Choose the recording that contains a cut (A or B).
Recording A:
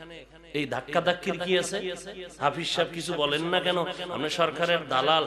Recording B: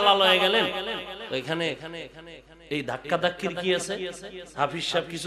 B